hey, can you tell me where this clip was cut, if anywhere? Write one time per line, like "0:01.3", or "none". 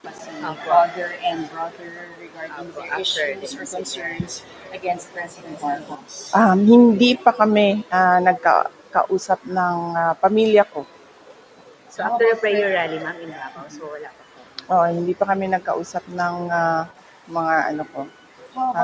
none